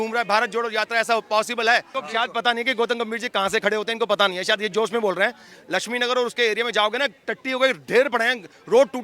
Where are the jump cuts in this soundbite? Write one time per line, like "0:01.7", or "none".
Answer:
0:01.9